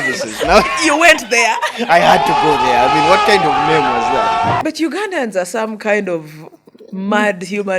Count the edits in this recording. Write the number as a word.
one